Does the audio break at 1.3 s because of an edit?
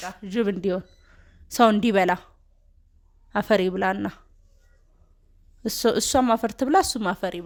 no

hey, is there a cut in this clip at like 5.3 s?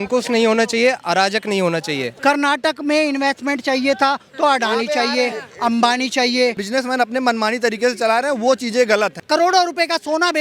no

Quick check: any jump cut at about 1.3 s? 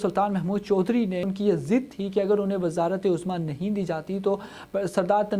yes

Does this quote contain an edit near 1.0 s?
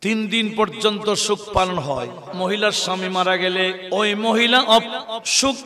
no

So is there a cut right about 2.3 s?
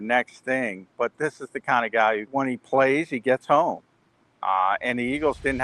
yes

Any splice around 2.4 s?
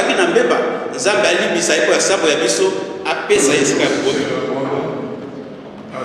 no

